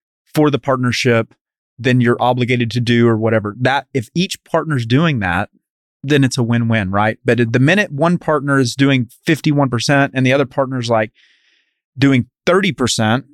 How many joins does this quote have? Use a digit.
0